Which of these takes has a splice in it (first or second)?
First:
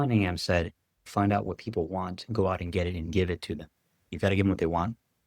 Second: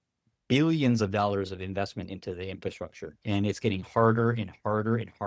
first